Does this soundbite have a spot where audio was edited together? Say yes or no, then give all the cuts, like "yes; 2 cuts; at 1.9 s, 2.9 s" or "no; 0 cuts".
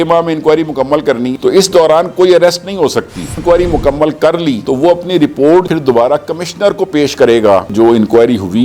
yes; 3 cuts; at 1.3 s, 3.3 s, 7.7 s